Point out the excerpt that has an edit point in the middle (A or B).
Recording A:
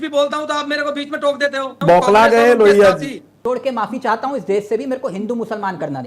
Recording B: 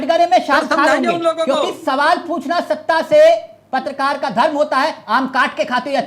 A